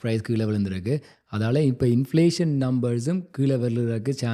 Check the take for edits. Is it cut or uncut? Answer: uncut